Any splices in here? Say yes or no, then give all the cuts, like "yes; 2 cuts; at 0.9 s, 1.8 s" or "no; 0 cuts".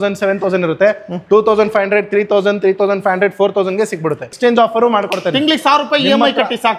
yes; 1 cut; at 4.3 s